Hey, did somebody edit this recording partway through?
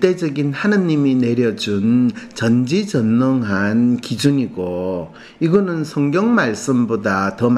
no; 0 cuts

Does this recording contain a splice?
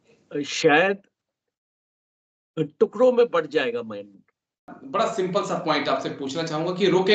yes; 1 cut; at 4.7 s

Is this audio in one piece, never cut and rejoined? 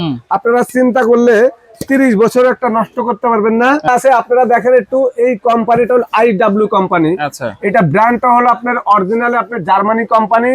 no; 1 cut; at 3.9 s

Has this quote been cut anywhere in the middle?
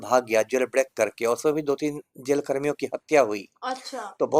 no; 0 cuts

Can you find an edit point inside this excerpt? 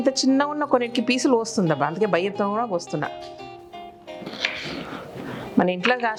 no; 0 cuts

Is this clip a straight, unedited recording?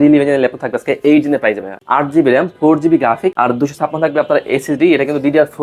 no; 2 cuts; at 1.7 s, 3.3 s

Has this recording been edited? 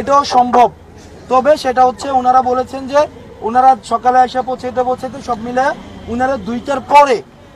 no; 0 cuts

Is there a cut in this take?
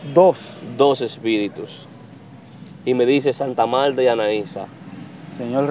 no; 0 cuts

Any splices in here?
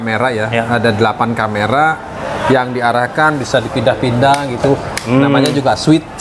no; 0 cuts

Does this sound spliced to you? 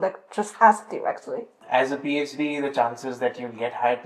yes; 1 cut; at 1.6 s

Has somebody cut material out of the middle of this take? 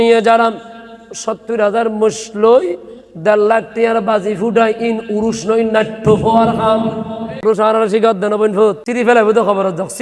yes; 2 cuts; at 7.3 s, 8.8 s

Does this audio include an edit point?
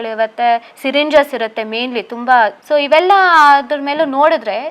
yes; 1 cut; at 2.6 s

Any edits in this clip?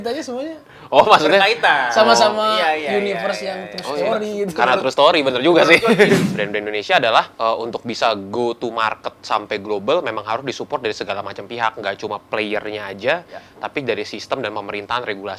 yes; 1 cut; at 6.3 s

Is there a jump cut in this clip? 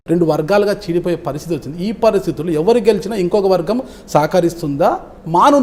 no; 0 cuts

